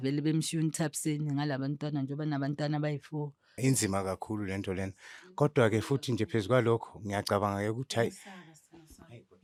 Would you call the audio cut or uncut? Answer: uncut